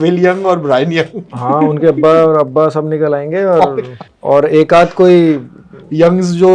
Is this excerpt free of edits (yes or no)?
yes